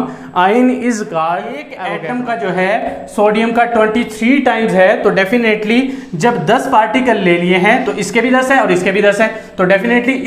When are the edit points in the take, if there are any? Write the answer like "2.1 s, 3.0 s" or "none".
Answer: 1.7 s

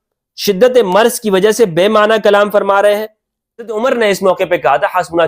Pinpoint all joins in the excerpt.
3.7 s

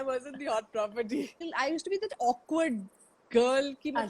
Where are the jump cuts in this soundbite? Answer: 1.4 s

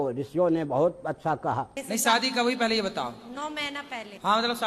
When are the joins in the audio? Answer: 1.8 s

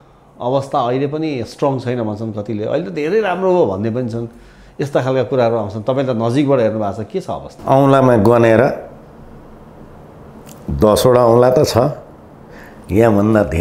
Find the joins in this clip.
none

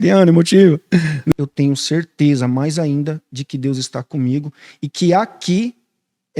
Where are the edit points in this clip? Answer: 1.3 s

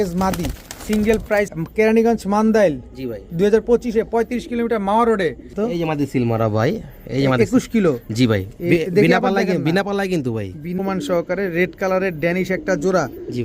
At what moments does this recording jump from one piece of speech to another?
1.5 s, 5.5 s, 10.8 s

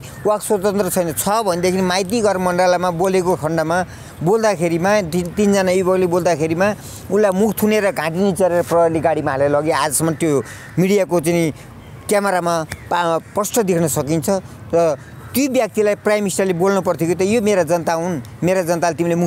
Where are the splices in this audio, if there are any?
none

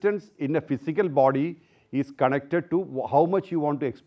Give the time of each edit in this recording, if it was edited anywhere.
none

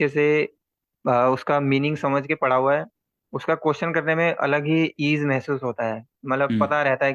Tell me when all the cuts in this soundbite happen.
none

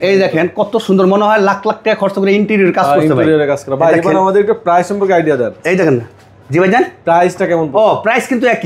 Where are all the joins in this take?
none

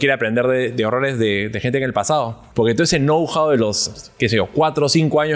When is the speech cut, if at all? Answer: 2.4 s

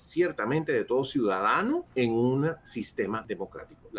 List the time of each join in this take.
1.9 s, 3.2 s

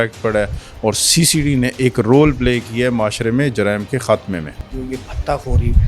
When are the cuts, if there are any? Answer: 4.6 s

